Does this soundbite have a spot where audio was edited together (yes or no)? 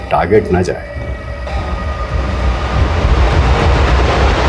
yes